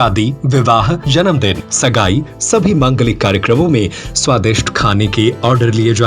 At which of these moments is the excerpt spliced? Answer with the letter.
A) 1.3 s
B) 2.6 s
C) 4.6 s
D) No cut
A